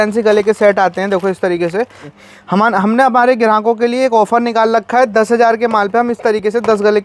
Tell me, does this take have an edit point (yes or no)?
yes